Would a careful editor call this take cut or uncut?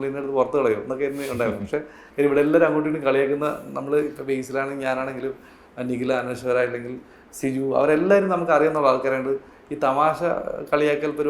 cut